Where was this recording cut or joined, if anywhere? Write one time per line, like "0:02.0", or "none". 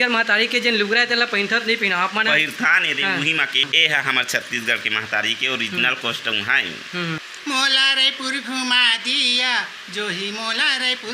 0:03.6
0:07.2